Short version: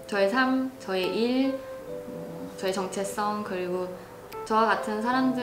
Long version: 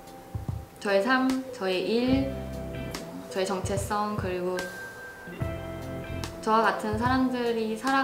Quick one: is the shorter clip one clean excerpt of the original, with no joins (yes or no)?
no